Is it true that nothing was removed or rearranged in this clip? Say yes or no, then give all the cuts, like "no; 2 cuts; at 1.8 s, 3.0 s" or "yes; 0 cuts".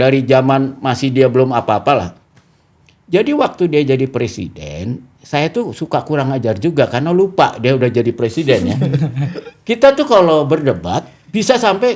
yes; 0 cuts